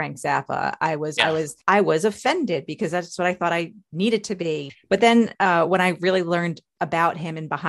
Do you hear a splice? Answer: yes; 2 cuts; at 1.2 s, 4.7 s

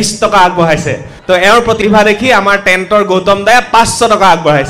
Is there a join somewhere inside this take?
yes; 2 cuts; at 1.1 s, 1.8 s

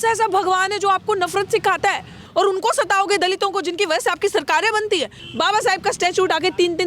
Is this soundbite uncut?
no; 2 cuts; at 2.2 s, 5.2 s

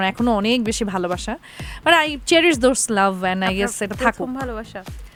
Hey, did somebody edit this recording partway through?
no; 0 cuts

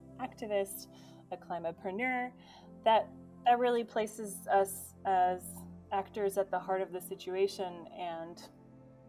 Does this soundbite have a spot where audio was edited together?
no; 0 cuts

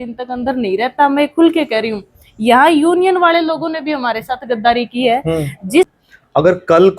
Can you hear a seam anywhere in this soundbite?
yes; 1 cut; at 5.9 s

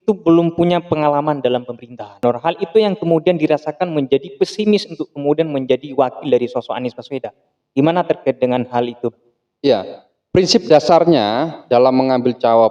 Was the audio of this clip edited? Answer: yes; 1 cut; at 2.2 s

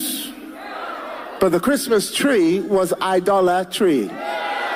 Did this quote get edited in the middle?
no; 0 cuts

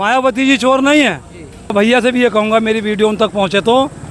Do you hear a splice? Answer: yes; 1 cut; at 1.7 s

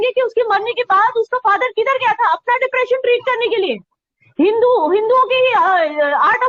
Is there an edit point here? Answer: no; 0 cuts

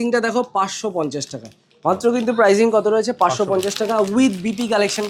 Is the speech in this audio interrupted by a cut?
no; 0 cuts

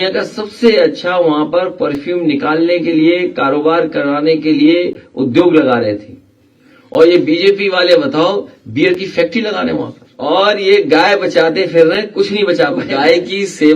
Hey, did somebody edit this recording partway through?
yes; 2 cuts; at 10.0 s, 12.9 s

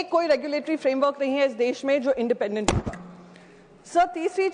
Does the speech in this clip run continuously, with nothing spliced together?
yes; 0 cuts

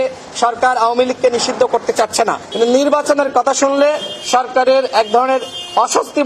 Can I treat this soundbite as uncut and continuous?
no; 1 cut; at 2.4 s

